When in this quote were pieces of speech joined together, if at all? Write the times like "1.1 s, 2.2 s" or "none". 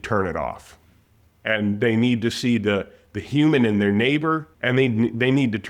4.5 s